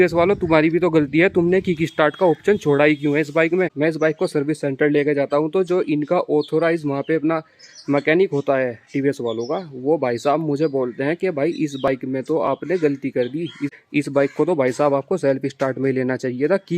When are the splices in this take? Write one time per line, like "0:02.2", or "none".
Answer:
0:03.7
0:13.6